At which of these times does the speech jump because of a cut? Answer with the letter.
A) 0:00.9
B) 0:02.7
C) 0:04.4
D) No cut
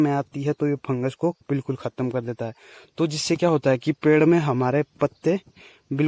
D